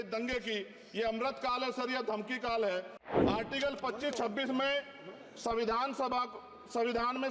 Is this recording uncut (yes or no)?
no